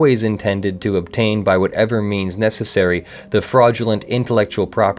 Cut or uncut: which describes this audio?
uncut